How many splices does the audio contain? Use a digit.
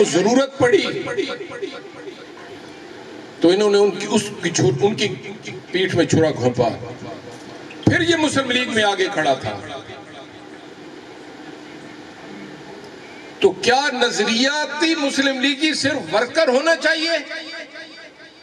0